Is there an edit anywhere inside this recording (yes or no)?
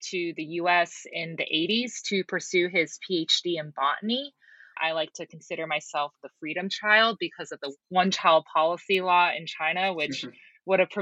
yes